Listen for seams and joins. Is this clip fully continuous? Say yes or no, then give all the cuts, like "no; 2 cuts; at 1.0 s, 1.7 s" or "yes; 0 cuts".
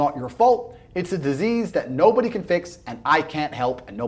yes; 0 cuts